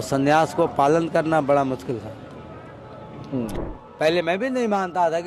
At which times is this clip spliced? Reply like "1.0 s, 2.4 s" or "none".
3.7 s